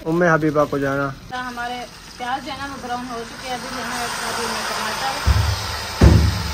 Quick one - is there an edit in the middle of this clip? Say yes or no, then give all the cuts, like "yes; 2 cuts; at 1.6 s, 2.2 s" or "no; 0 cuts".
yes; 1 cut; at 1.3 s